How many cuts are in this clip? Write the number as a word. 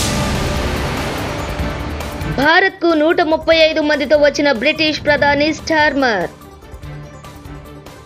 one